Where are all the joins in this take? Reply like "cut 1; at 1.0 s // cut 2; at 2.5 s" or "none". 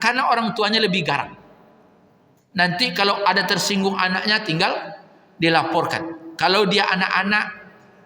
none